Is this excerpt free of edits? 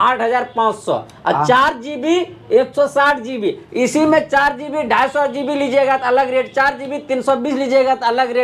yes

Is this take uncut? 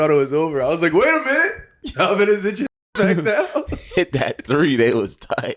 yes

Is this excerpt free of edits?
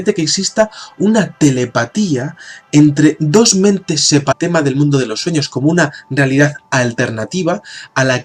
yes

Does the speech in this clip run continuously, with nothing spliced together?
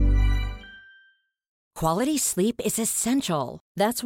no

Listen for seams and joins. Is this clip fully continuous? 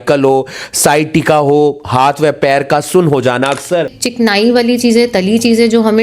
no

